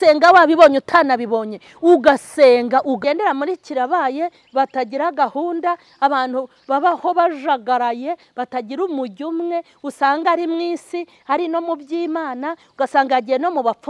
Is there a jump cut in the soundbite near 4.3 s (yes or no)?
no